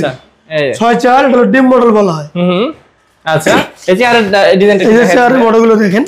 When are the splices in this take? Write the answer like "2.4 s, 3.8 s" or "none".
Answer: none

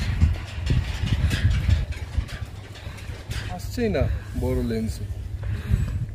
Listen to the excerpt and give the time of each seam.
3.6 s

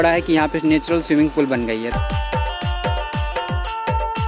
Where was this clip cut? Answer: 1.9 s

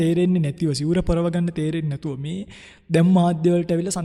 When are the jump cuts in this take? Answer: none

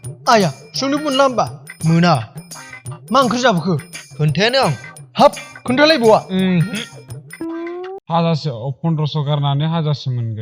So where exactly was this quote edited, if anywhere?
8.0 s

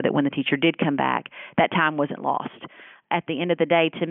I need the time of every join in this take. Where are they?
3.0 s

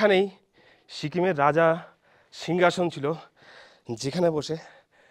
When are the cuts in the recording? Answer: none

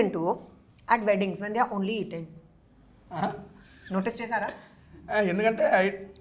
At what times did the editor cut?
none

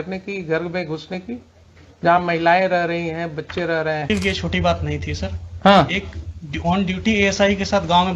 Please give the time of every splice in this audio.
4.1 s

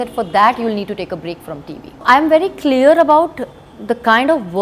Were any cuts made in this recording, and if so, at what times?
2.0 s, 3.6 s

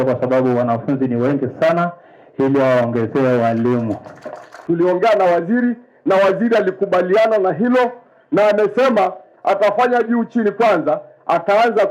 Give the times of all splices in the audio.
4.5 s

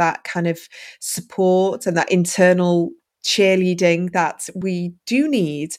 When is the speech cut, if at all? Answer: 3.1 s, 4.5 s

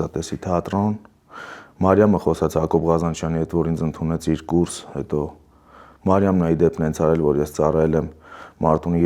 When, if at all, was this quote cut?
none

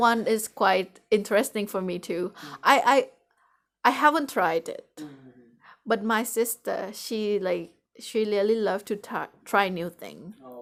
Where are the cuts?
none

